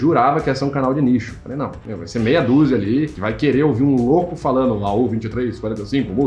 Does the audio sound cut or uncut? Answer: uncut